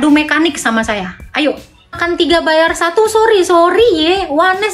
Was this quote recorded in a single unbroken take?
no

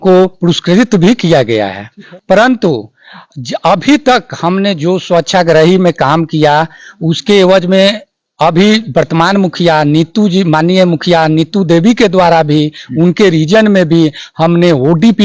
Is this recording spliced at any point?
no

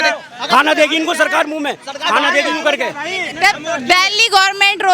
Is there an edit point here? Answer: yes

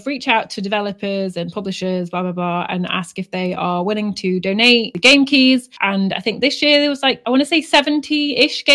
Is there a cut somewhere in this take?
no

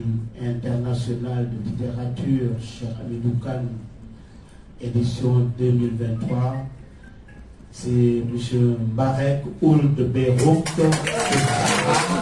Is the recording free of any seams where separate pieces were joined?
yes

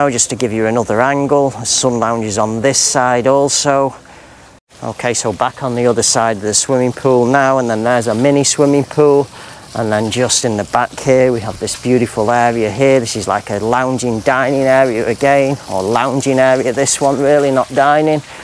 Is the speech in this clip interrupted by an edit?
no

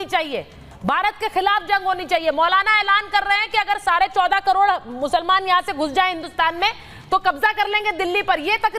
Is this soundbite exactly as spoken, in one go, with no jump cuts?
yes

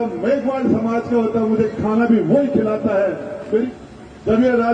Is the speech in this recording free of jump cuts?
no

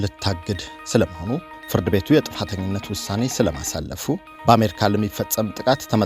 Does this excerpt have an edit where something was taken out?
yes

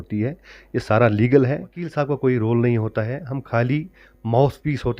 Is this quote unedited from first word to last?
no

